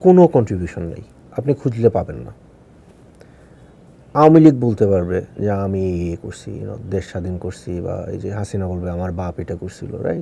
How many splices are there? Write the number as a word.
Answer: one